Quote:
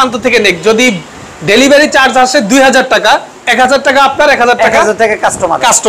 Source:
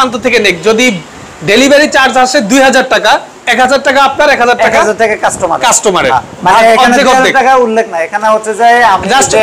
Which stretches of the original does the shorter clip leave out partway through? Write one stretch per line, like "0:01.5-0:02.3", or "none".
none